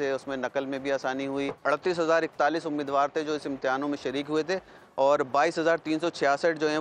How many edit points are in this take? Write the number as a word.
one